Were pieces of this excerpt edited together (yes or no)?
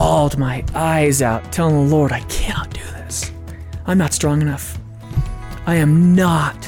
yes